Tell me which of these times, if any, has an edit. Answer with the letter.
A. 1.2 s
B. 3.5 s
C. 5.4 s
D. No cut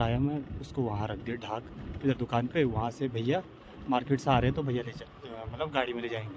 D